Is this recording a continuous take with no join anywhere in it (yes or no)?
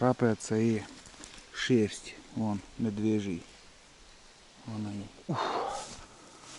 no